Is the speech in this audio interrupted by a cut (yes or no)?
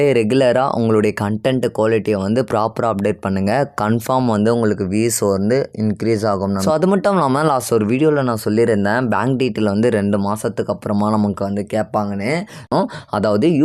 yes